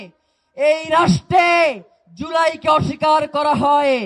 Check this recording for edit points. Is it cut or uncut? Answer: uncut